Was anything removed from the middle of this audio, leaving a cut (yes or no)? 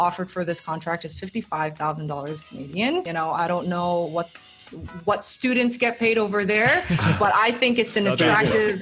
yes